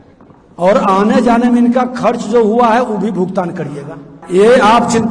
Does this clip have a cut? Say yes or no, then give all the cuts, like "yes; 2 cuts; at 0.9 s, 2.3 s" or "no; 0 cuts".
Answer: yes; 1 cut; at 4.1 s